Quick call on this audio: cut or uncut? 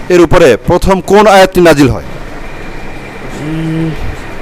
uncut